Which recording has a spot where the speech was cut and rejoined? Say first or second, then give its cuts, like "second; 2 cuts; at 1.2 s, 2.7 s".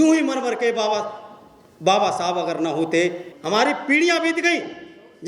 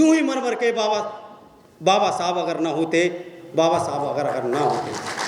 first; 1 cut; at 3.3 s